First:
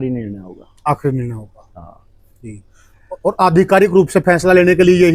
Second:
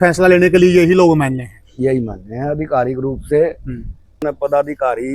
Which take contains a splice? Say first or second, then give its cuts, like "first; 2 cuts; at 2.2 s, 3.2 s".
second; 1 cut; at 4.2 s